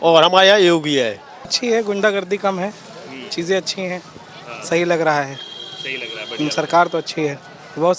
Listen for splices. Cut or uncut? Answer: cut